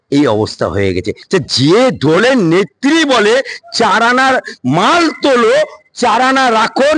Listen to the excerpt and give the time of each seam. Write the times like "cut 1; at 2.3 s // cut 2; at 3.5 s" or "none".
cut 1; at 1.1 s